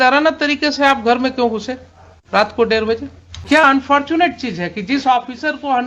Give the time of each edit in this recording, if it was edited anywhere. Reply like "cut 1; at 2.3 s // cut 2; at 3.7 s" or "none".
cut 1; at 3.4 s